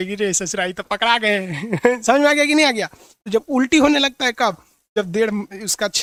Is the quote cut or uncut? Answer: uncut